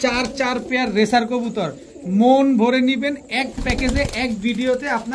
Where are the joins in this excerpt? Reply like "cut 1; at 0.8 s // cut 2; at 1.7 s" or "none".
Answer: none